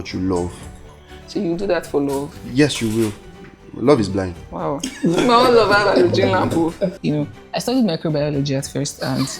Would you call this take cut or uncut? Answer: cut